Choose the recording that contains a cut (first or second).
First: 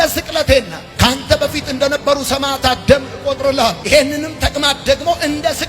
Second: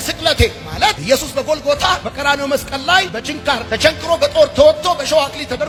first